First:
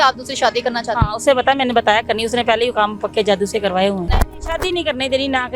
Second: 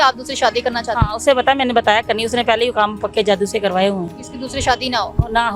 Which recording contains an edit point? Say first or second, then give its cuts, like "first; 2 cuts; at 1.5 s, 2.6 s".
first; 1 cut; at 4.1 s